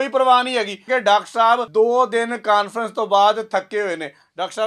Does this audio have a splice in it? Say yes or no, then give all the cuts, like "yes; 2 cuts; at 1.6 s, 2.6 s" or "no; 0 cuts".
yes; 2 cuts; at 0.9 s, 1.7 s